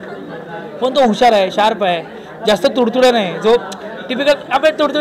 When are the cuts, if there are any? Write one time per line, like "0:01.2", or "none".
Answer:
none